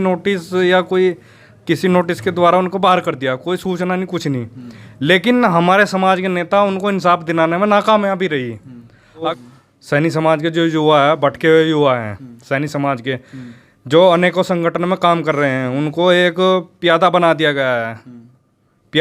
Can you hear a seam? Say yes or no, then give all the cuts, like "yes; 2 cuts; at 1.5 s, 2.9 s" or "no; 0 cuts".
yes; 1 cut; at 9.3 s